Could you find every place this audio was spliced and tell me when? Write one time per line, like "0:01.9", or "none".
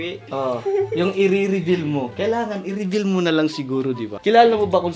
0:02.1
0:04.1